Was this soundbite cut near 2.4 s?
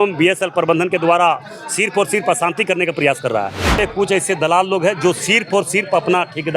no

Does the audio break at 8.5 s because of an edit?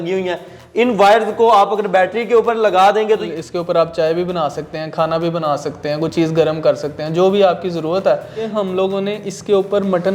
yes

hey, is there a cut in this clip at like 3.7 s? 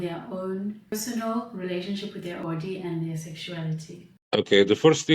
no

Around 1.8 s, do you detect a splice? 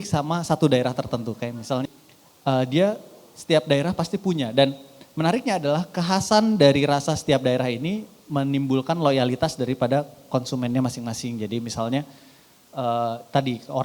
yes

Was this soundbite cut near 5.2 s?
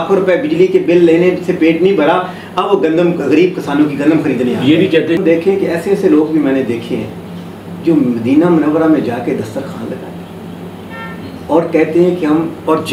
yes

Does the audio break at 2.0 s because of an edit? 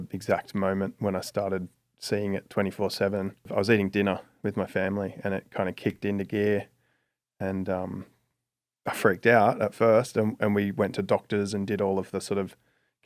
no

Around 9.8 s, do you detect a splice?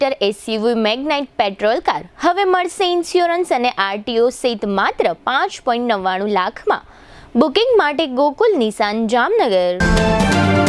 yes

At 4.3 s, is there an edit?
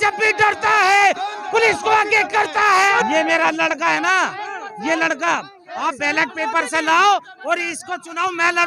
no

